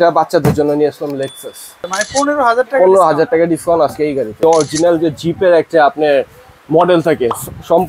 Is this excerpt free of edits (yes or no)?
no